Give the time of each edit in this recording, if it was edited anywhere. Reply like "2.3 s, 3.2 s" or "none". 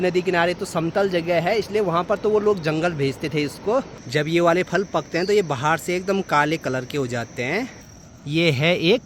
4.0 s, 7.8 s